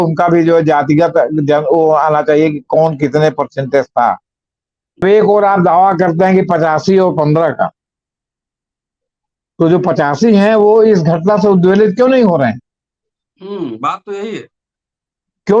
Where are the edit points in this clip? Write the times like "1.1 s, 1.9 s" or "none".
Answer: 5.0 s